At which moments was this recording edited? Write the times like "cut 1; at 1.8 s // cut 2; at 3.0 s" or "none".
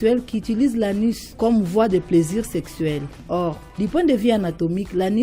cut 1; at 1.3 s // cut 2; at 3.4 s